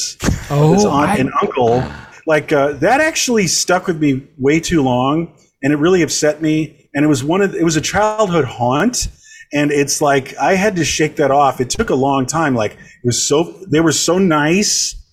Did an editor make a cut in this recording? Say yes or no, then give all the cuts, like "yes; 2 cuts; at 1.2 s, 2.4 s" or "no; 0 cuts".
yes; 1 cut; at 2.1 s